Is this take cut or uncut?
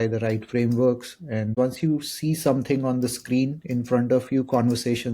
cut